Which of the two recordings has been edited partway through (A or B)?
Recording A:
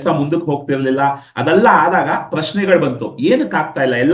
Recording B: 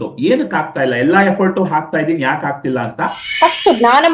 B